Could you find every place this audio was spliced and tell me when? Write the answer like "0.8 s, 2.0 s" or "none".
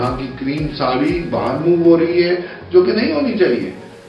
none